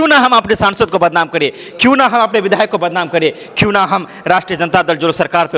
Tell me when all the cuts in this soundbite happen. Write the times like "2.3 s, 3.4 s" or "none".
none